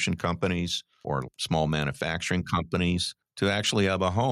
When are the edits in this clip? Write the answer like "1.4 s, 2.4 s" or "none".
1.3 s, 3.2 s